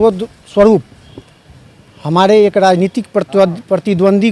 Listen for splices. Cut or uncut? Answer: uncut